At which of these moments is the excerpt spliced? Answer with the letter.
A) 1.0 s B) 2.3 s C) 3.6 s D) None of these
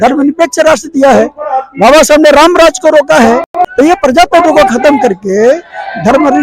C